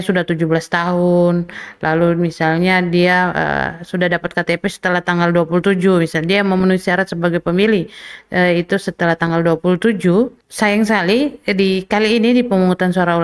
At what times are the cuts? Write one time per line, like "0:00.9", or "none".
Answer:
0:10.4